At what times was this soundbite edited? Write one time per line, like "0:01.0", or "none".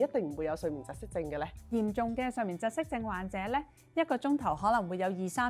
0:01.6